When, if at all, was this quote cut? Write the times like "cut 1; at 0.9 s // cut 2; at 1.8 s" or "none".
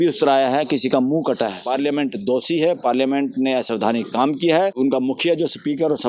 cut 1; at 1.6 s // cut 2; at 4.7 s